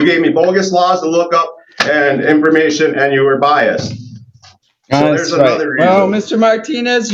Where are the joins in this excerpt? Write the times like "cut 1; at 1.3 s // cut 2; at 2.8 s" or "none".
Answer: none